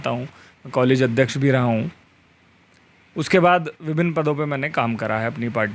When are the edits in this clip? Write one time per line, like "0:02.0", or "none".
none